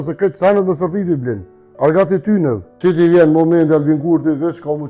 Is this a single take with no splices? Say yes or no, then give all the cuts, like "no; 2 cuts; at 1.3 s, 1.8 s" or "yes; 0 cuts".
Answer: no; 1 cut; at 2.7 s